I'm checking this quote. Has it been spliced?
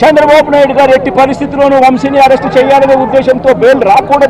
no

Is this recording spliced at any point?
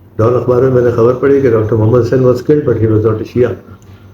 no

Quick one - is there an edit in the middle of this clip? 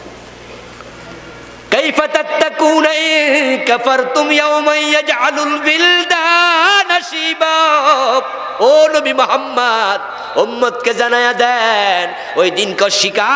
yes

